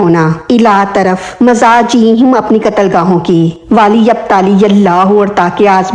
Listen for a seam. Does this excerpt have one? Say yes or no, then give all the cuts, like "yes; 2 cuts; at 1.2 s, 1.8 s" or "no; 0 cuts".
yes; 1 cut; at 3.6 s